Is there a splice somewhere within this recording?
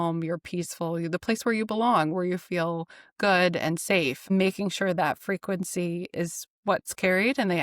yes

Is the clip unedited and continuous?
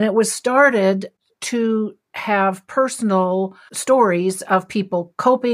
no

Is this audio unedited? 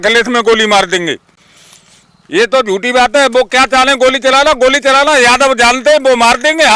yes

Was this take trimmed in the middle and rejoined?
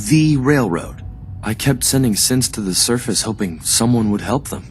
yes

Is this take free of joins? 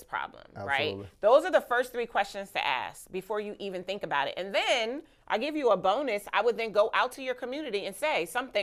yes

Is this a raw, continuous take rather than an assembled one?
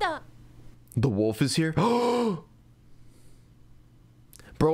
yes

